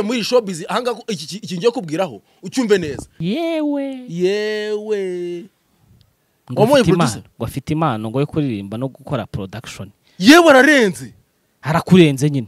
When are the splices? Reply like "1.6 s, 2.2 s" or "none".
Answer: 3.1 s